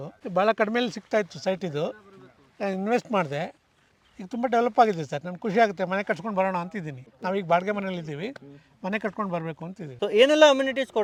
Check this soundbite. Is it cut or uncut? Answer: uncut